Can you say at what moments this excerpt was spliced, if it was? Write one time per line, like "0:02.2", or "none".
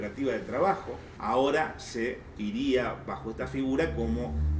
0:01.1